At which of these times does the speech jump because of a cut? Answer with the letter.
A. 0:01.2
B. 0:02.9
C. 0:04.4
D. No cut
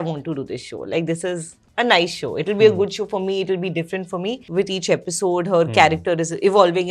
C